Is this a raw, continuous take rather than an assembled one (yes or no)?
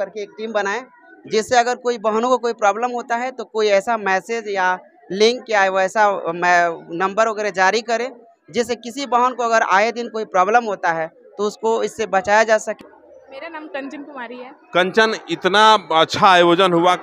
no